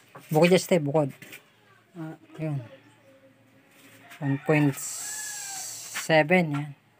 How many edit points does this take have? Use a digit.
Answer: 1